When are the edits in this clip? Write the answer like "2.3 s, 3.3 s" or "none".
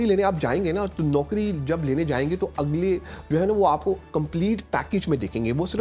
none